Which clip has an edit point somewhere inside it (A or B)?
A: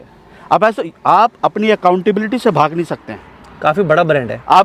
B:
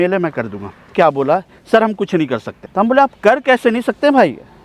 B